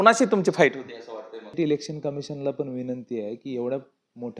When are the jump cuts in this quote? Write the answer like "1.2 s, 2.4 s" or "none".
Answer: 1.6 s